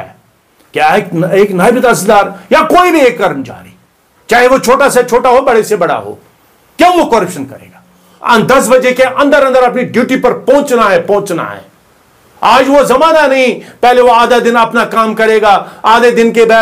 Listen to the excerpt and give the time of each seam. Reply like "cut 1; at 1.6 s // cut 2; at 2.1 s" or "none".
cut 1; at 8.1 s